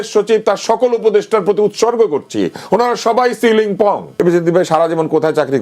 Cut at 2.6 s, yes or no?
no